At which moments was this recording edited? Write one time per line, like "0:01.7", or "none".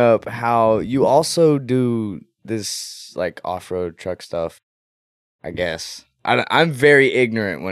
none